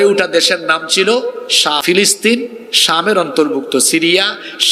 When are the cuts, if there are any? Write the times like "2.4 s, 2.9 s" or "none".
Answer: 1.7 s